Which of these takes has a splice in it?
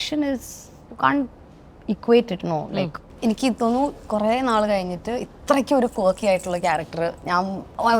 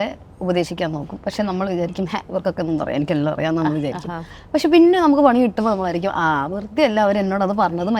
first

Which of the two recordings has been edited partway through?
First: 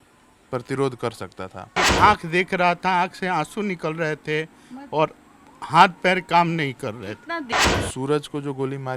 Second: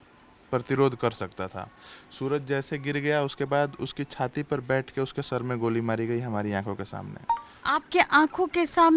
first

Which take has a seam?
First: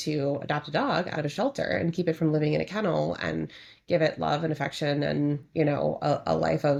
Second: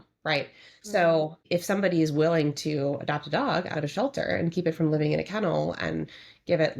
second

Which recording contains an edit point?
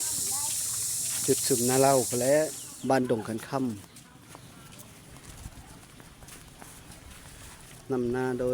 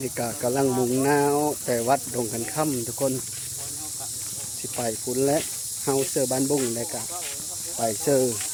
first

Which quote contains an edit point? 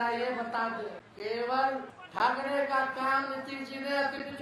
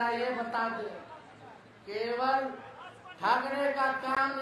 first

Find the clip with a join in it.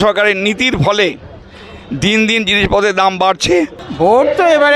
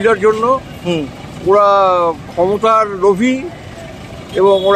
first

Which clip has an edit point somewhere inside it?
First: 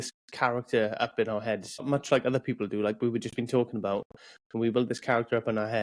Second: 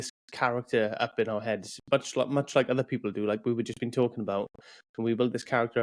first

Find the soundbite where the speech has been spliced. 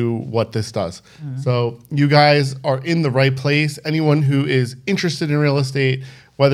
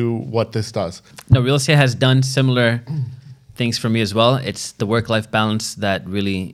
second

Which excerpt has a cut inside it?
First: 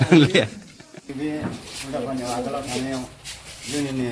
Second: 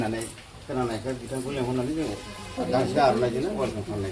first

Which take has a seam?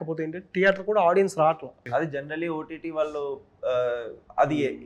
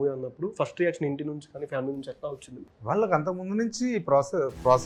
first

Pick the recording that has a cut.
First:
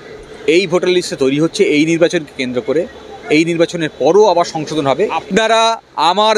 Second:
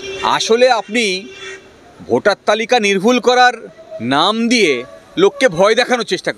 first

